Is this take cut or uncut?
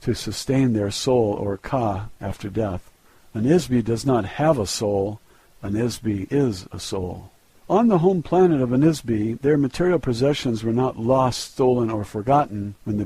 uncut